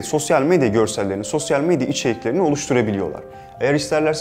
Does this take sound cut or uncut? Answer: uncut